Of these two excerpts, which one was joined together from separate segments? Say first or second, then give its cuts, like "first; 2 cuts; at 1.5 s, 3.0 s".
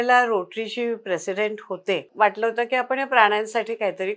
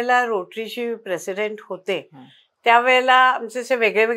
first; 1 cut; at 2.1 s